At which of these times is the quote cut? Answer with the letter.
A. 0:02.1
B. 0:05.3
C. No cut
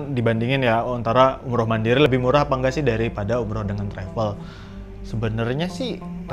A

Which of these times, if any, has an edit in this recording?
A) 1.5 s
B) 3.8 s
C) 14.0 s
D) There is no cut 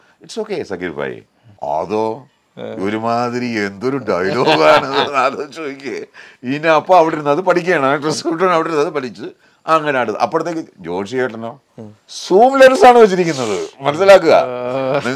A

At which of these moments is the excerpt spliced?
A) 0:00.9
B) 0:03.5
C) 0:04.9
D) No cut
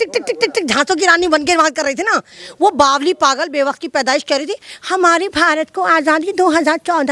D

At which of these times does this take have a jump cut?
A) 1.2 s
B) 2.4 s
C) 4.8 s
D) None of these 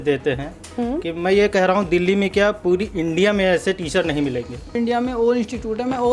C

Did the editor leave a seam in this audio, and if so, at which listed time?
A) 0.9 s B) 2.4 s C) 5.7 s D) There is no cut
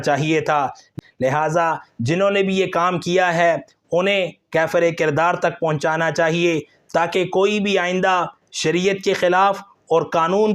A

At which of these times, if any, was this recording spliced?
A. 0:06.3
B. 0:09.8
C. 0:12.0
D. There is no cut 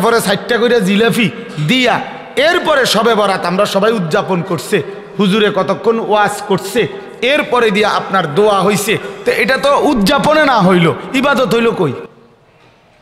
D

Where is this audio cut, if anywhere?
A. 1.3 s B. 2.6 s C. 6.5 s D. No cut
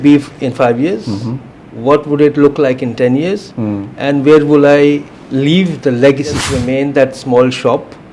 C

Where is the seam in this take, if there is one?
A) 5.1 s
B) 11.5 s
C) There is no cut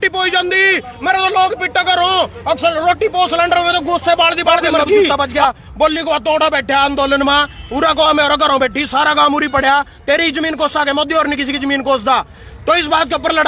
A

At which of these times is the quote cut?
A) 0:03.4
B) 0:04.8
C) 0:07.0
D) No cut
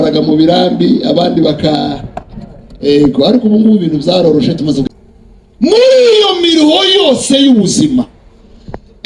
B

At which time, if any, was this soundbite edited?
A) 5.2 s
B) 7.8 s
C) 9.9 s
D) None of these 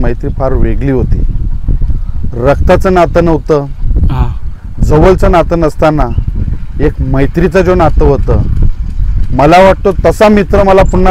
D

